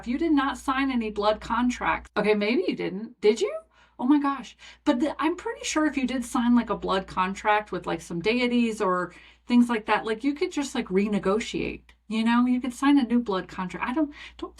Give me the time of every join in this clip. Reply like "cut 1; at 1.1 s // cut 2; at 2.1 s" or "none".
cut 1; at 2.0 s